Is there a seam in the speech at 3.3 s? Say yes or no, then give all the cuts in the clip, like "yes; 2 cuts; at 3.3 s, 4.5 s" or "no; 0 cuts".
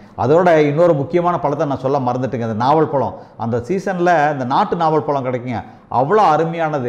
no; 0 cuts